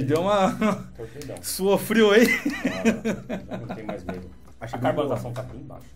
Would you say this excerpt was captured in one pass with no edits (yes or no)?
no